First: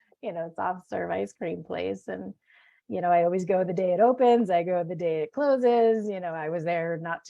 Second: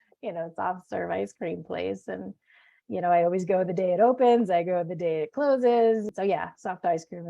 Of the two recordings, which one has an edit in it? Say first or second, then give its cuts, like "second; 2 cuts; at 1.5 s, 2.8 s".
second; 1 cut; at 6.1 s